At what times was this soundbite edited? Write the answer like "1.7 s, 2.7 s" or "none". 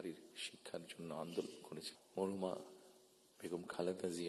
1.9 s